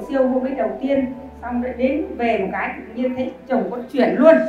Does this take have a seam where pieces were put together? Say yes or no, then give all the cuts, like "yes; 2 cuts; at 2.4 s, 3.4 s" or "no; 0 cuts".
no; 0 cuts